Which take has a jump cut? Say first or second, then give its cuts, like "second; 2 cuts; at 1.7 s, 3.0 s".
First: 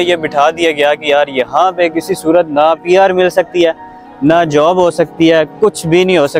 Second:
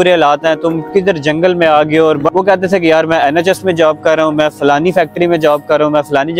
second; 1 cut; at 2.2 s